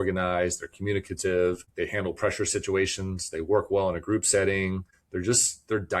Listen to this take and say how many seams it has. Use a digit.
2